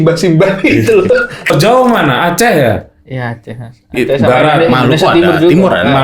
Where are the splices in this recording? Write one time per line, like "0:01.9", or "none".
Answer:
0:01.5

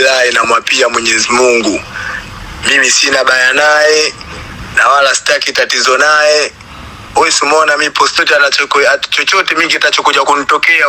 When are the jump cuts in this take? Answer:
0:08.2

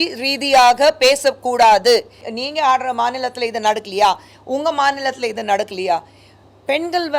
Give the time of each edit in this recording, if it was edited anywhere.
0:02.3

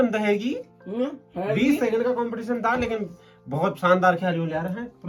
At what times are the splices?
none

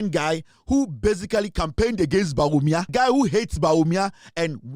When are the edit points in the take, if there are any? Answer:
0:02.9

